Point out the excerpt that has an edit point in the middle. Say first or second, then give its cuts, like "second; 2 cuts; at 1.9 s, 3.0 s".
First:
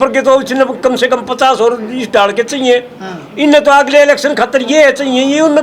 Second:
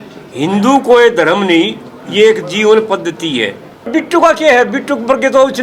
second; 1 cut; at 3.9 s